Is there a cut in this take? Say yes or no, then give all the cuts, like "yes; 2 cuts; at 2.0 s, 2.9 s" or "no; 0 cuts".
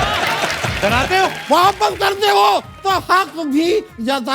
yes; 1 cut; at 1.4 s